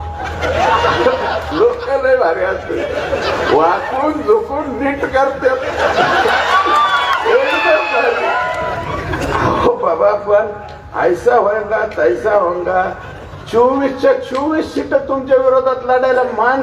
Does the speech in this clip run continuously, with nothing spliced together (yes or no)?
no